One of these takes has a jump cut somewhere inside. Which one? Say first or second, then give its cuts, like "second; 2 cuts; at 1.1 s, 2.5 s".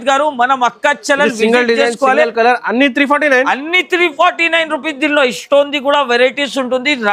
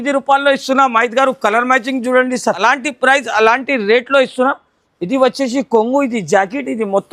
second; 1 cut; at 2.6 s